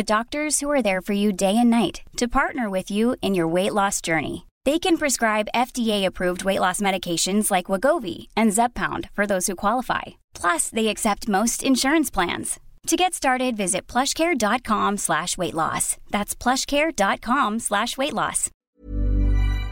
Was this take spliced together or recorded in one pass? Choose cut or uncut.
cut